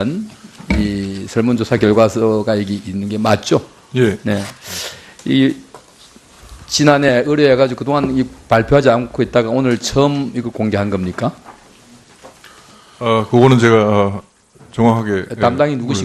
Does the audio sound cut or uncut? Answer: uncut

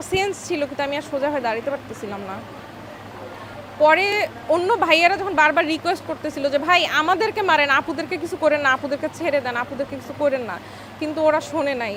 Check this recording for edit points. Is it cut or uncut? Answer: uncut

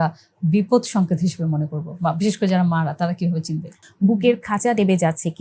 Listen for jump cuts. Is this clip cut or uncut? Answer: cut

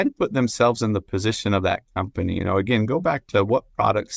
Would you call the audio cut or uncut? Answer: uncut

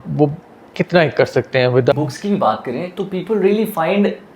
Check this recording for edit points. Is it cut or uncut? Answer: cut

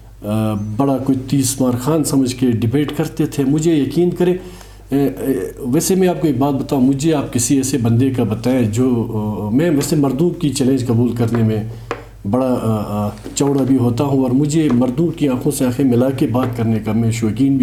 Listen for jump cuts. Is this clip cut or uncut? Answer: uncut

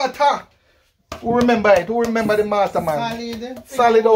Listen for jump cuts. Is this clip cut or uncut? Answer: uncut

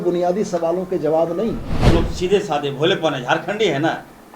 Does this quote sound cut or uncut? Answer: cut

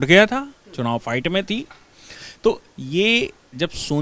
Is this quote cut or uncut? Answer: uncut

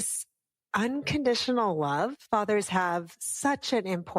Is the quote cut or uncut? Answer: cut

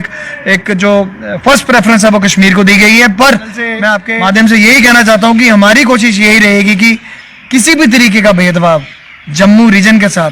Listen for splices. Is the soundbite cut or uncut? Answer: cut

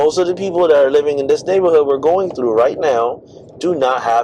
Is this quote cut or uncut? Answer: uncut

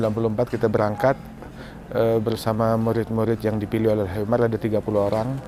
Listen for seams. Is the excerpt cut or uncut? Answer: uncut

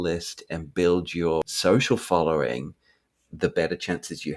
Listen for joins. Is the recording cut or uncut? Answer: cut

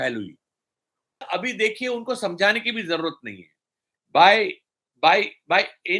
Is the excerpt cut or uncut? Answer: cut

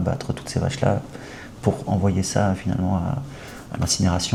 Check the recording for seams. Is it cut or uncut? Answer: uncut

